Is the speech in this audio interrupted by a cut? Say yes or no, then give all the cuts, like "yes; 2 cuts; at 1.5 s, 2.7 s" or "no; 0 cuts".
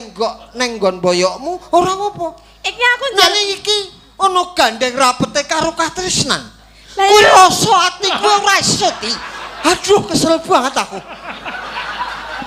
no; 0 cuts